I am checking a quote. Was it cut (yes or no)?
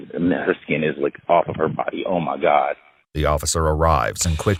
no